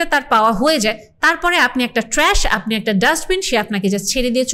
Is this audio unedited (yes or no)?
yes